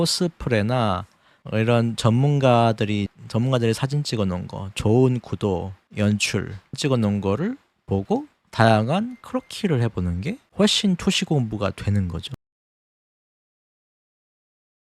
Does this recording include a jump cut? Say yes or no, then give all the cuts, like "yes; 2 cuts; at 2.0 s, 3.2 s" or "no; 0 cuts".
no; 0 cuts